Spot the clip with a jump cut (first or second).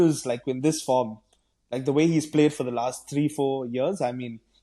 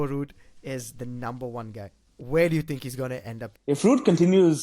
second